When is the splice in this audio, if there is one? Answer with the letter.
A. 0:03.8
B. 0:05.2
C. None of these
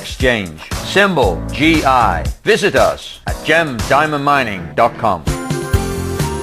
B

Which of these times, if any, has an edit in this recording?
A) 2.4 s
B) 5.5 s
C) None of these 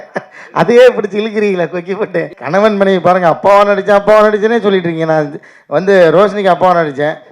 A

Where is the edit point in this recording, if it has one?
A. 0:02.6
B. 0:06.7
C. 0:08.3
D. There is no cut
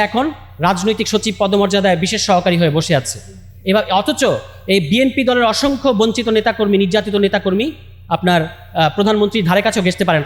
D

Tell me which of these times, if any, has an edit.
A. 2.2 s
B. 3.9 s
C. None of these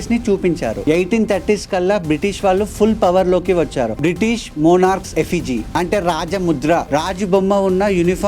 B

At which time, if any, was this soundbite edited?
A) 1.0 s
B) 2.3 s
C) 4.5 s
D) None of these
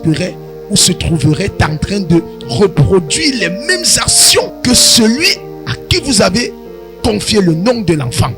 C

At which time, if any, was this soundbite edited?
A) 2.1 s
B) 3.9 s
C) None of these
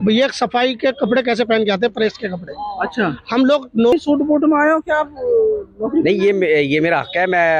B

